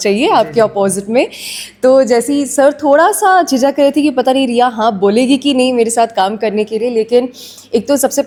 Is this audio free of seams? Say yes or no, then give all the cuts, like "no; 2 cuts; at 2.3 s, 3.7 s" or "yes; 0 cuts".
yes; 0 cuts